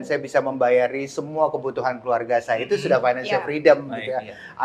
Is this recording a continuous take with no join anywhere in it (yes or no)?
yes